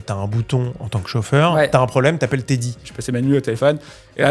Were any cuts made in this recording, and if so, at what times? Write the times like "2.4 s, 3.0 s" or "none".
2.8 s